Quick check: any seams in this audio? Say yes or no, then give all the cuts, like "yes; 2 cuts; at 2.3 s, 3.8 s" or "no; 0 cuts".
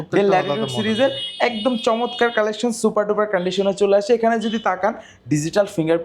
no; 0 cuts